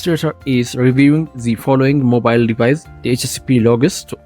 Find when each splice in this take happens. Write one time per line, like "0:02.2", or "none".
0:02.9